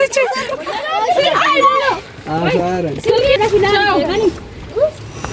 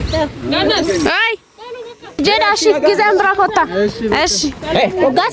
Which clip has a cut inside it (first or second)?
first